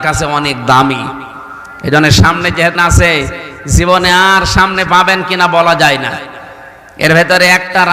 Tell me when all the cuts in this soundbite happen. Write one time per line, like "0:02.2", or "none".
0:02.7